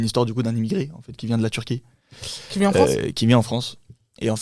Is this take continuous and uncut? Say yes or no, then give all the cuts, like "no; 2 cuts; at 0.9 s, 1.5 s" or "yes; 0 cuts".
yes; 0 cuts